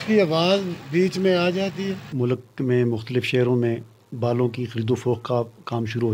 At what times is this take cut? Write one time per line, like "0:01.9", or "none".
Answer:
0:02.0